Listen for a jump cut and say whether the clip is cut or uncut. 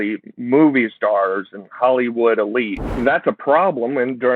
cut